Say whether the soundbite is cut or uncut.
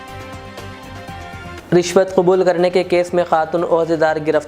cut